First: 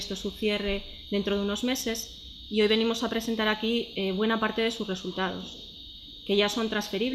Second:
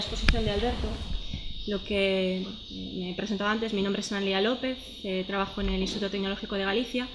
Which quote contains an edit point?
first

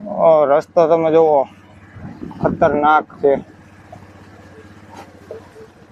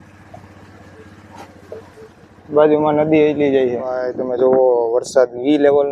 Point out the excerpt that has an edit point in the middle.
second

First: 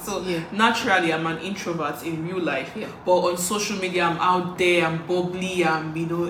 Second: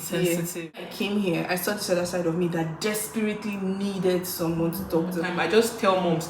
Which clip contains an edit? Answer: second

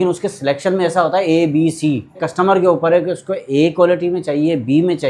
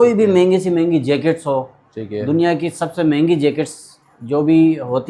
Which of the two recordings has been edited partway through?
first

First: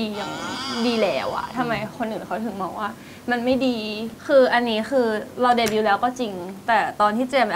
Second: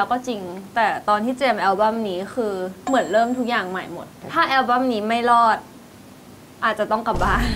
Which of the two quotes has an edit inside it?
first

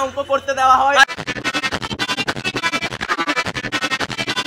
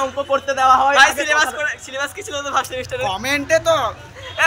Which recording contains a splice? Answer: second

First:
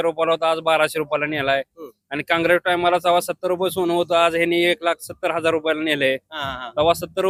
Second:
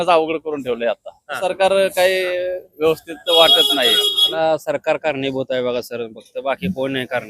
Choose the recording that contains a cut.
second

